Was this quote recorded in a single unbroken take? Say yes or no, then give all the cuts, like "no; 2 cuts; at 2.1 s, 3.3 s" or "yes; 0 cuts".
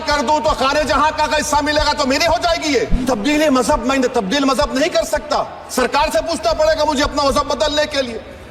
no; 1 cut; at 2.9 s